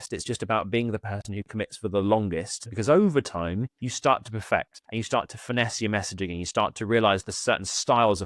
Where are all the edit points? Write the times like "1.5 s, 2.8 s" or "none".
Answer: 2.7 s, 3.8 s, 4.8 s

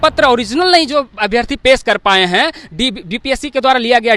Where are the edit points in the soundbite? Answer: none

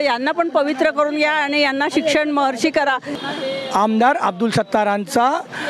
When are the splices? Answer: 3.1 s

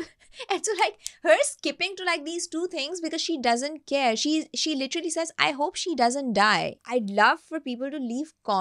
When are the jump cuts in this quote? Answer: 6.8 s

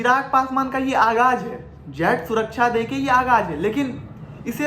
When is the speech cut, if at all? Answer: none

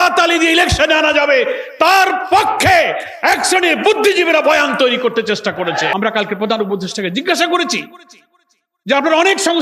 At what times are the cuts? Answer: 5.9 s

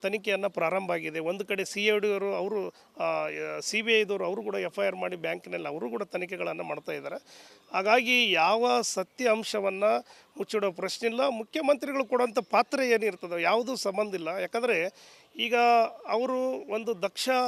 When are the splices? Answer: none

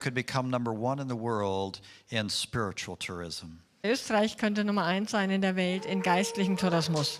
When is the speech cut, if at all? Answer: 3.7 s

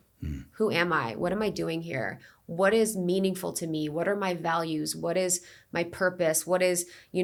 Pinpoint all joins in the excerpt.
none

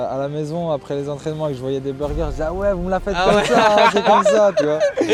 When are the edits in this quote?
none

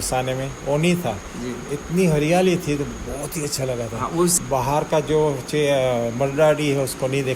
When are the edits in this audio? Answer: 4.3 s

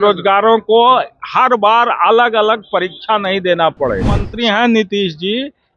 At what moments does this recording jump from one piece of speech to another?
4.3 s

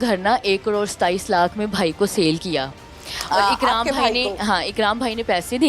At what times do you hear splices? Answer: none

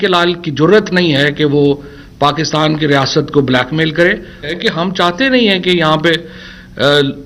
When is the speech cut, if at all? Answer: 4.5 s

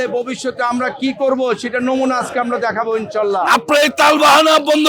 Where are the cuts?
3.5 s

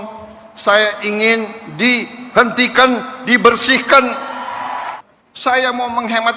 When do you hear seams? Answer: 4.9 s

